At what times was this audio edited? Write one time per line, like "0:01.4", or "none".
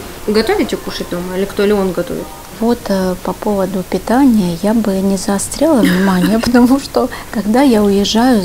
none